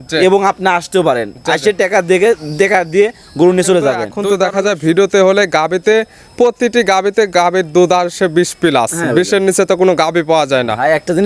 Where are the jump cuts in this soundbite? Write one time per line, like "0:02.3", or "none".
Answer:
0:04.2